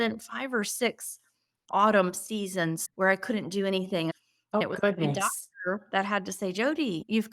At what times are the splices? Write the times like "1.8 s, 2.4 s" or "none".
2.8 s, 4.6 s